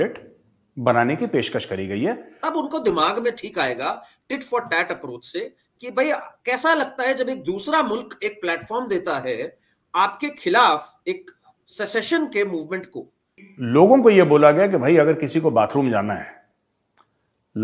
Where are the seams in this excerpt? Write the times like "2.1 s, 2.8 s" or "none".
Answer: 2.3 s, 13.5 s